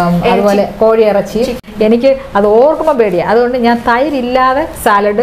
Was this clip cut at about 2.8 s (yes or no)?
no